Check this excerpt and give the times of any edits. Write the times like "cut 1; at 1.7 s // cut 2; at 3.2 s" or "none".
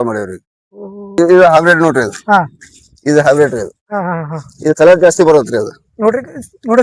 cut 1; at 1.1 s